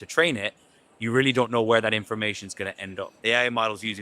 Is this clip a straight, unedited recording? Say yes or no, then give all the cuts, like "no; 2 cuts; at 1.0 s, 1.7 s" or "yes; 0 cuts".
no; 1 cut; at 3.1 s